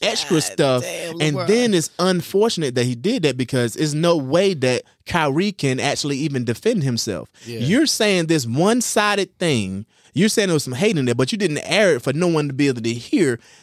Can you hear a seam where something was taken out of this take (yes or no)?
no